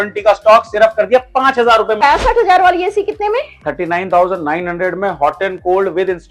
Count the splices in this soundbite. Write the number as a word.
one